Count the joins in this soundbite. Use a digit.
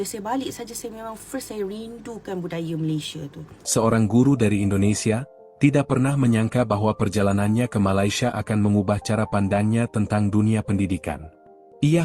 1